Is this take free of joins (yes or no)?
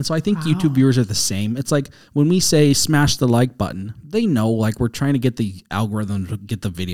yes